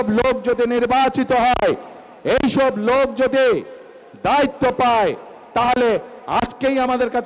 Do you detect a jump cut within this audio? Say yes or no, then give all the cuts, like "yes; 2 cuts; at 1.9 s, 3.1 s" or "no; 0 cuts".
no; 0 cuts